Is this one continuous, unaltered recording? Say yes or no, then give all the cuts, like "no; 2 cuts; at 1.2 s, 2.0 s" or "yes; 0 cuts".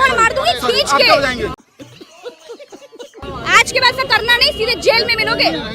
no; 2 cuts; at 1.5 s, 3.2 s